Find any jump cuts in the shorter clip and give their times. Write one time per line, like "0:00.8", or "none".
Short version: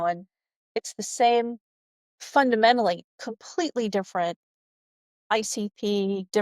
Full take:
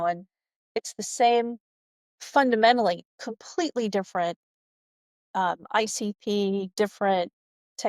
0:05.2